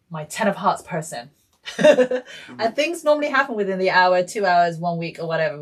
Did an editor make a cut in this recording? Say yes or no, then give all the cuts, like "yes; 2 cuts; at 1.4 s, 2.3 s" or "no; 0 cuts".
no; 0 cuts